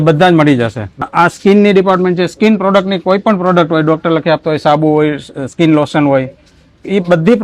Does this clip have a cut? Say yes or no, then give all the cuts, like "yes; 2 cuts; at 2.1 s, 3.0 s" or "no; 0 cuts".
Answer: yes; 1 cut; at 1.1 s